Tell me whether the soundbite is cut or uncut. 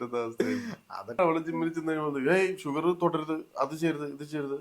cut